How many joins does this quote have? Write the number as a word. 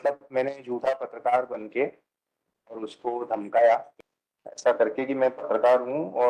one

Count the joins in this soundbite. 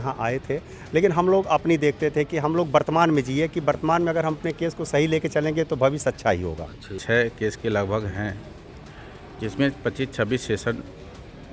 one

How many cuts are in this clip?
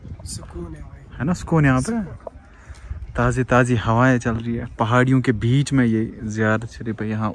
zero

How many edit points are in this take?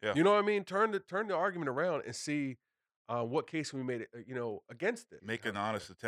one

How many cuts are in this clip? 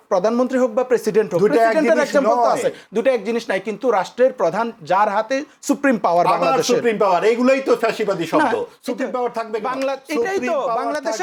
zero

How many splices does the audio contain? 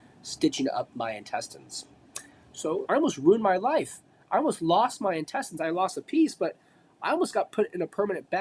one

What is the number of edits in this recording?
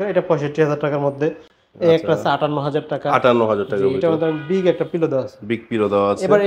zero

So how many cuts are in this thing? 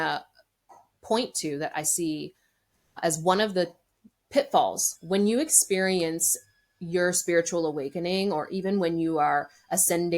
one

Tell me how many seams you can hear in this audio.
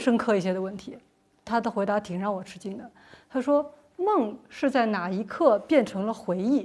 zero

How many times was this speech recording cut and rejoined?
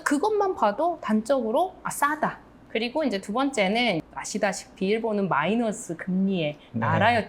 two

